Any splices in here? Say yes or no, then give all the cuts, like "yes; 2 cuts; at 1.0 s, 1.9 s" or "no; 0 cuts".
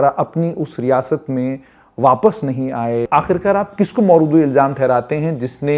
yes; 1 cut; at 3.1 s